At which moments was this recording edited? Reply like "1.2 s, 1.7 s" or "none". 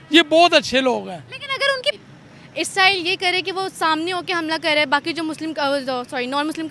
1.9 s